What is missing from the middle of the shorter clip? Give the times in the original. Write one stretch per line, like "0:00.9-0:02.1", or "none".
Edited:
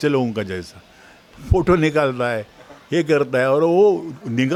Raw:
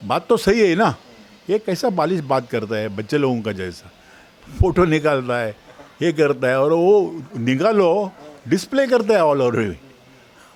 none